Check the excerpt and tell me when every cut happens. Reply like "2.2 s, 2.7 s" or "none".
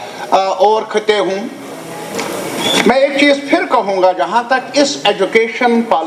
none

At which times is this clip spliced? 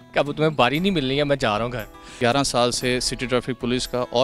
2.0 s

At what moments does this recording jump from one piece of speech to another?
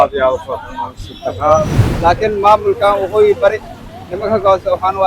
1.8 s

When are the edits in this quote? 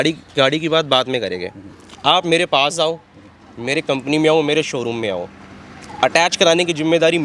none

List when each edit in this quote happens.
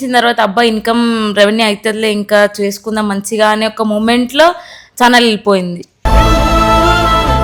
none

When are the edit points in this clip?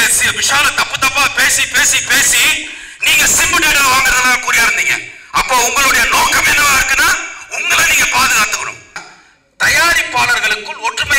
9.1 s

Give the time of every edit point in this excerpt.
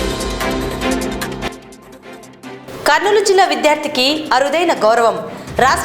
1.3 s, 2.6 s

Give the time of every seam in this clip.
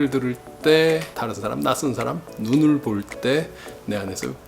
1.1 s

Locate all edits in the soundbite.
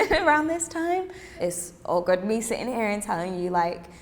1.4 s

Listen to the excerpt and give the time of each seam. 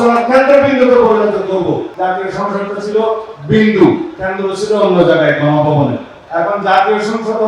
1.9 s, 6.1 s

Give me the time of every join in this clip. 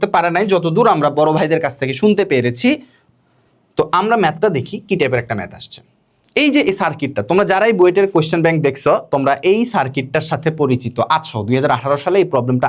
none

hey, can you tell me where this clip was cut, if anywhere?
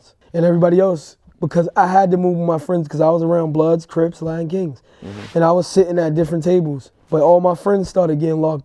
none

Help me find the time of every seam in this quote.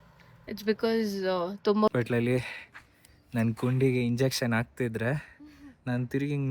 1.9 s

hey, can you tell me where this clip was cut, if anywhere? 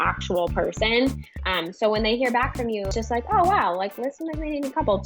2.9 s

